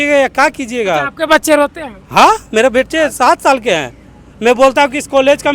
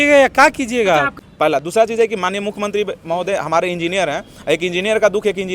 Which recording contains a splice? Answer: second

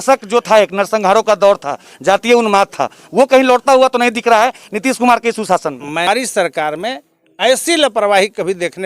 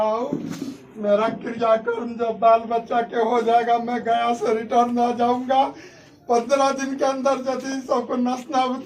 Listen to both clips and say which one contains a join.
first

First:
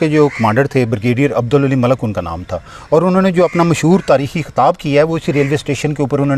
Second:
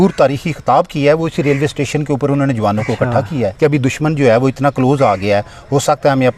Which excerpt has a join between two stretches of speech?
second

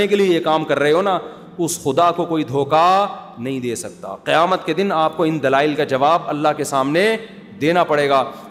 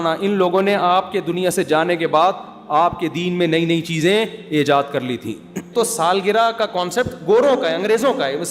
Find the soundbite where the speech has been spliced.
second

